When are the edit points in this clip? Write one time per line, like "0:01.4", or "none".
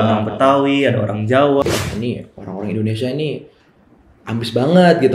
0:01.6